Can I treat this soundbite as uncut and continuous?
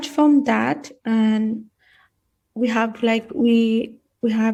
yes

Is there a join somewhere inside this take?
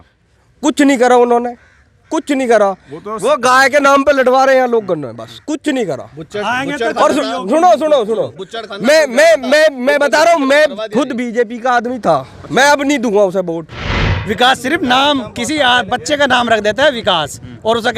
yes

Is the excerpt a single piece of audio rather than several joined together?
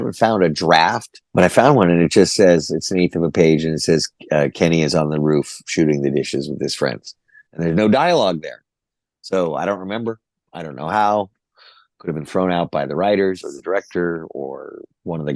no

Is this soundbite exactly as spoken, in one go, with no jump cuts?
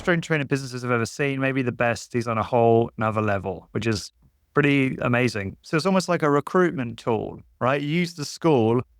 no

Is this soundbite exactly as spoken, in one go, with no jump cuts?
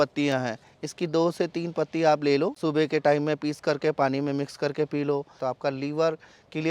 no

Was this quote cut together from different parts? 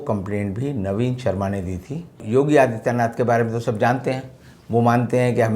yes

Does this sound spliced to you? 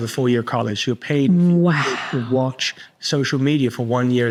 no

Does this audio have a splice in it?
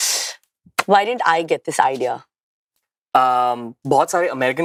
no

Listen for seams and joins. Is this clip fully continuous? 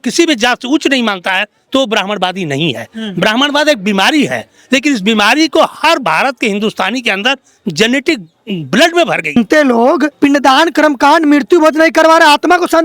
no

